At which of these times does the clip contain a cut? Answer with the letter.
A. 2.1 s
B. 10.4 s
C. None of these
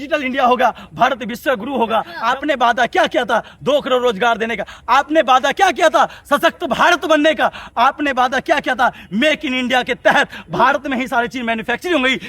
A